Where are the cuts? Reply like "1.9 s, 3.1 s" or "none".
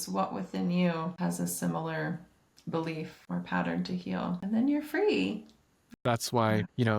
1.1 s, 3.2 s, 4.4 s, 5.9 s